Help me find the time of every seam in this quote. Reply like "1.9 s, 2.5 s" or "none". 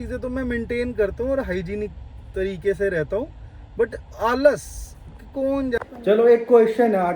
5.8 s